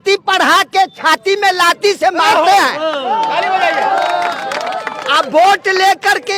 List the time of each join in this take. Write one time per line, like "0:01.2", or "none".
none